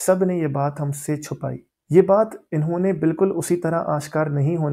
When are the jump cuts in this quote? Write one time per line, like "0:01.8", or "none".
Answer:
0:01.7